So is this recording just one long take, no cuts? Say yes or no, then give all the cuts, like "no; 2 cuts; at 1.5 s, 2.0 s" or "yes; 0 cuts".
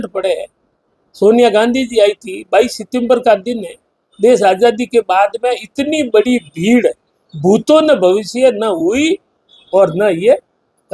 yes; 0 cuts